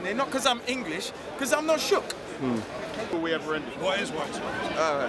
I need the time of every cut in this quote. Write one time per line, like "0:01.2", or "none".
0:03.1